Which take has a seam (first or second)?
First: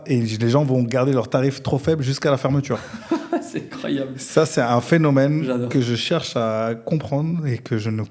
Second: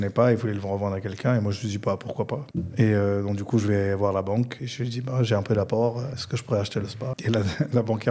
second